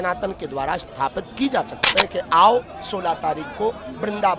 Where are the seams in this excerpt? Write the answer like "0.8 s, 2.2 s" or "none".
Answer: 1.9 s